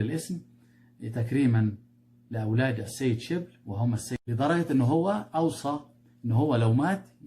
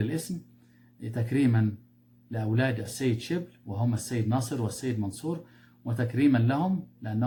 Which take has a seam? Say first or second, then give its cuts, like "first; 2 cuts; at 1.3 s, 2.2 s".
first; 1 cut; at 4.1 s